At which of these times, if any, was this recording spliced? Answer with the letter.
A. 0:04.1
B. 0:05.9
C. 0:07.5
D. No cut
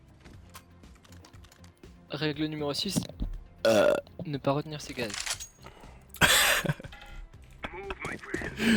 D